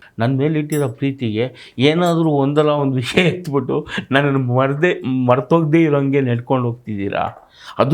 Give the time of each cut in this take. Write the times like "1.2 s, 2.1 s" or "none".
none